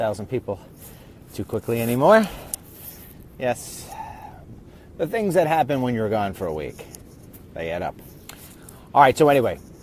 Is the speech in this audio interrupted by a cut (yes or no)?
yes